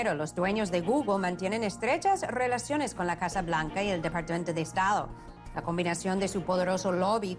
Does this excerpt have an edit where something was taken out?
no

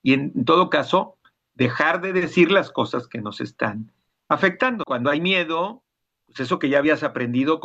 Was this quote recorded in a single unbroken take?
no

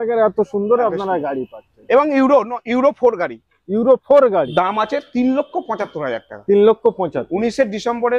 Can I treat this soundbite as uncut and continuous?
no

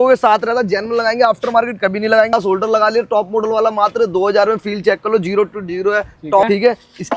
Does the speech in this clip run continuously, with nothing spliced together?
no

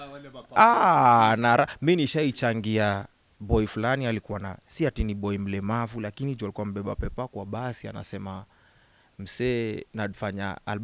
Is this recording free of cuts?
yes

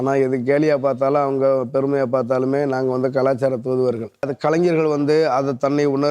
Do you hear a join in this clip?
yes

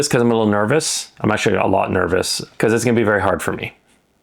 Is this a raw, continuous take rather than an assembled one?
no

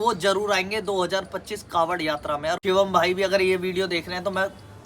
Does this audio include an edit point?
yes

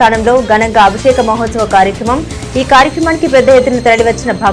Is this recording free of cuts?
yes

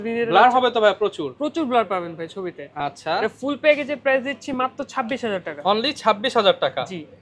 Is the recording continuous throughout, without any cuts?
yes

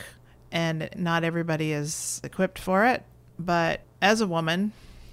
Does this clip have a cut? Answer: yes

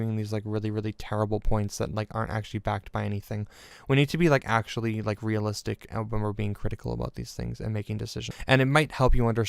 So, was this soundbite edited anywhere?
yes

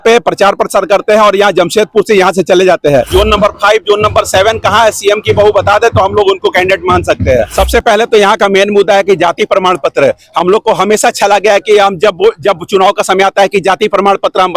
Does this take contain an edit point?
yes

